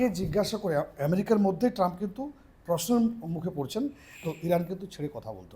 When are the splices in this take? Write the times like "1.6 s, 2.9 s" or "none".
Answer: 4.3 s